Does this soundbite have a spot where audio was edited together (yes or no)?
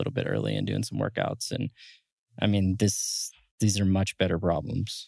no